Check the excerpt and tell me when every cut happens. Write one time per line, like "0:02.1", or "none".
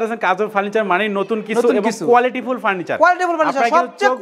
none